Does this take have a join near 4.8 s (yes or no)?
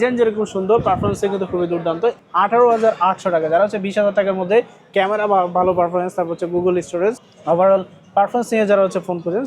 no